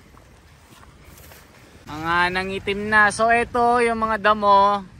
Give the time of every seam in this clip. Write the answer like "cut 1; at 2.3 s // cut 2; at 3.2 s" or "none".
cut 1; at 1.8 s